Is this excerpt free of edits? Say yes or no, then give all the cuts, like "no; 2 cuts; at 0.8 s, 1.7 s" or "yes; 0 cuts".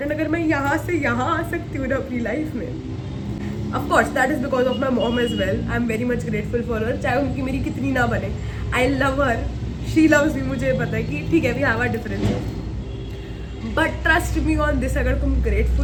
yes; 0 cuts